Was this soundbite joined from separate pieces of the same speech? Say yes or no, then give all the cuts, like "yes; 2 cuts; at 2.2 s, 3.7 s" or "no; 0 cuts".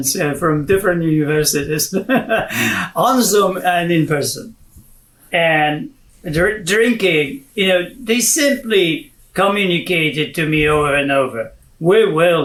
no; 0 cuts